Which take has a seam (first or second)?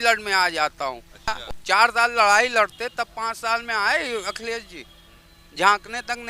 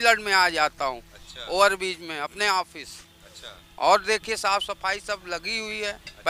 first